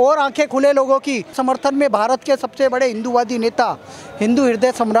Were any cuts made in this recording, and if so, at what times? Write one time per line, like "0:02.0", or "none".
0:01.4